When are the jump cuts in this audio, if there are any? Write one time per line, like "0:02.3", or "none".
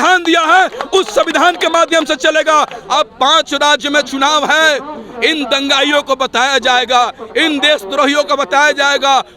0:02.8